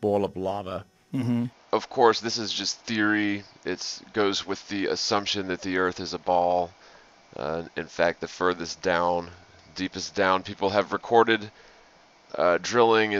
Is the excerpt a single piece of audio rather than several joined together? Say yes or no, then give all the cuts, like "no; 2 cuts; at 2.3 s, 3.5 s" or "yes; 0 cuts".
yes; 0 cuts